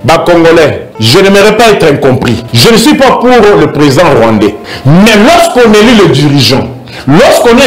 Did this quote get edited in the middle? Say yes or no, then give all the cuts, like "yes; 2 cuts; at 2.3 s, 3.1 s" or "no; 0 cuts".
yes; 3 cuts; at 0.9 s, 2.4 s, 4.7 s